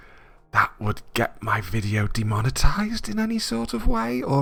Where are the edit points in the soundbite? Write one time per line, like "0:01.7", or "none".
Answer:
none